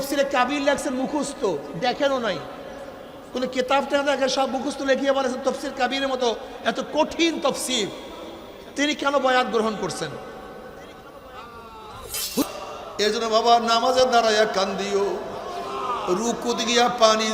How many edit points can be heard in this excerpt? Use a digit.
1